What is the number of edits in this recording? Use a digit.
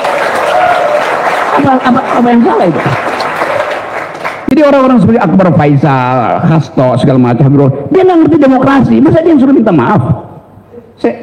1